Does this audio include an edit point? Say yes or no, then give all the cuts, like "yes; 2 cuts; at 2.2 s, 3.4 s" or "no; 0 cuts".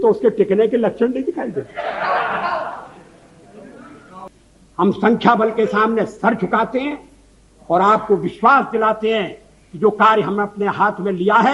yes; 1 cut; at 4.3 s